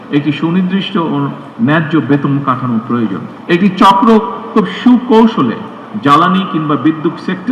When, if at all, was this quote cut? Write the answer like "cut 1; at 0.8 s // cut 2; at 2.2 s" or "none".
cut 1; at 3.3 s